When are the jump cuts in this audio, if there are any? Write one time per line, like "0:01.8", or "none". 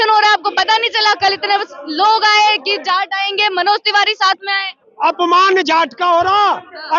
0:04.8